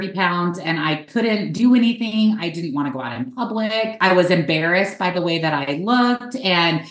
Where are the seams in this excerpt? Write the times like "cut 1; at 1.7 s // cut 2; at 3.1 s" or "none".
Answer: cut 1; at 4.0 s